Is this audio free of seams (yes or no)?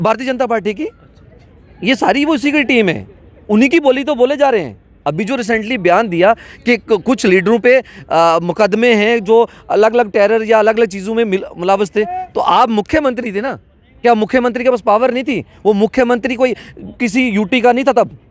yes